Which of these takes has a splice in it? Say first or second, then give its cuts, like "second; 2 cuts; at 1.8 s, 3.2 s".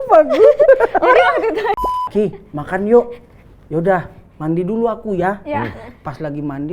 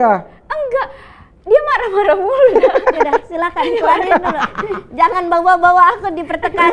first; 1 cut; at 1.8 s